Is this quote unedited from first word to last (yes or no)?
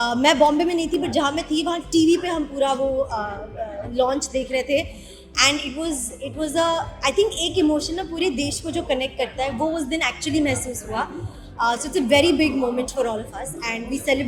yes